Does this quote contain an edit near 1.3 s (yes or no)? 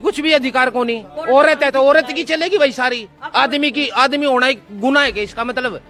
no